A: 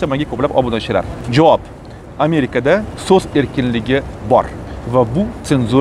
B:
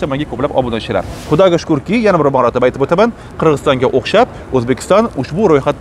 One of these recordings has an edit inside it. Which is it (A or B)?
B